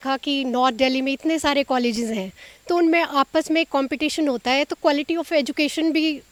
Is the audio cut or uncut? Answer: uncut